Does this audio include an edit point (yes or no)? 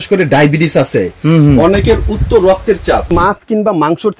yes